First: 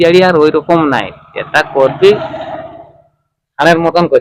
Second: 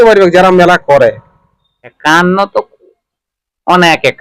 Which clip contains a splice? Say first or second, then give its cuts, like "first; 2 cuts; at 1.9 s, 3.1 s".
second; 1 cut; at 2.0 s